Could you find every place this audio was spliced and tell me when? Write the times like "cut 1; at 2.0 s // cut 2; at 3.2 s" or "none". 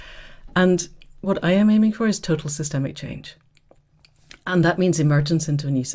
cut 1; at 1.2 s